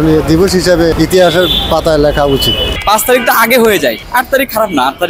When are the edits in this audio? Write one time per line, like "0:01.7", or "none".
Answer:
0:00.9
0:02.7
0:04.0